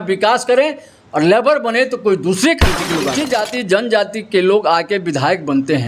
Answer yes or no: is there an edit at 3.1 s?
yes